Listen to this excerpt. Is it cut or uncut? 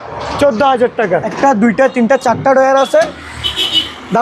cut